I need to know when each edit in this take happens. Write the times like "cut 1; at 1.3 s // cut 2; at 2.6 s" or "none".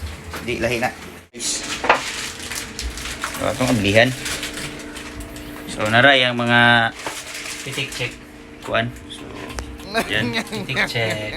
cut 1; at 1.6 s